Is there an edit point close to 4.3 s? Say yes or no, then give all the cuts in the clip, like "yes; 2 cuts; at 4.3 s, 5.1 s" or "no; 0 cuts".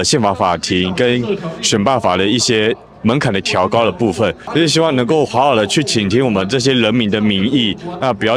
no; 0 cuts